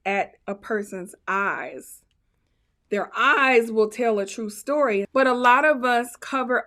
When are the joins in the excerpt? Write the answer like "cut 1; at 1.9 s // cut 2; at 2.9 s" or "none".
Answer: cut 1; at 5.1 s